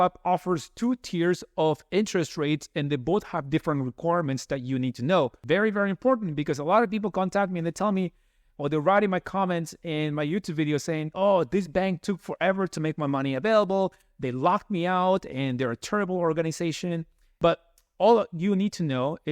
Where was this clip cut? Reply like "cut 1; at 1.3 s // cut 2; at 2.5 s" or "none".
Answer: cut 1; at 5.4 s // cut 2; at 17.2 s